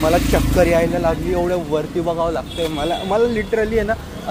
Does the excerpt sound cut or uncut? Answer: uncut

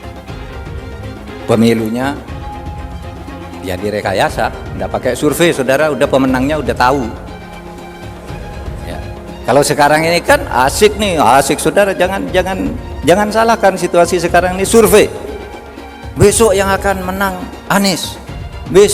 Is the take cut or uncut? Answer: cut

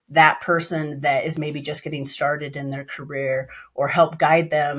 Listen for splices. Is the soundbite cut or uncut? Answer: uncut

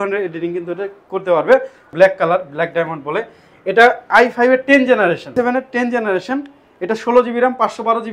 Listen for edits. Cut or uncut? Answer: cut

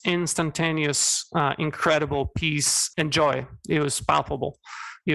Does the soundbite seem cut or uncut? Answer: cut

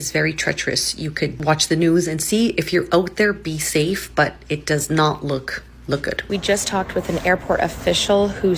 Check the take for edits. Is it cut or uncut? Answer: cut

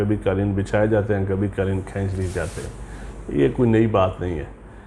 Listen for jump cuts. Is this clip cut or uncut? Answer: uncut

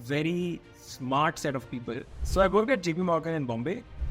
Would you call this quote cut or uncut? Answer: cut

